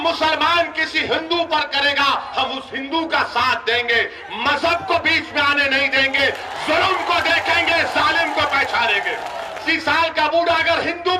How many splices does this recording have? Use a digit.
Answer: 1